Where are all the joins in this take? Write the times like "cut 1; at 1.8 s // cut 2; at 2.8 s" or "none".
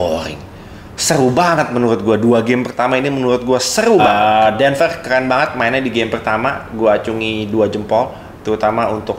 cut 1; at 4.0 s